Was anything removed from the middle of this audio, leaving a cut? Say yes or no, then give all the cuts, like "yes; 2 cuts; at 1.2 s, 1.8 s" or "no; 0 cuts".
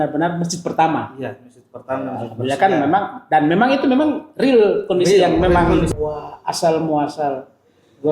yes; 1 cut; at 5.9 s